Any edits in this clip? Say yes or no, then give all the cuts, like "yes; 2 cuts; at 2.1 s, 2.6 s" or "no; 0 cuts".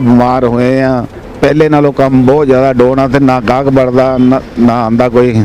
yes; 1 cut; at 1.2 s